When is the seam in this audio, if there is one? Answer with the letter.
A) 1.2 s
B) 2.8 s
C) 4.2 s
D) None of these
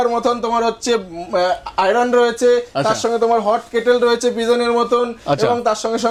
D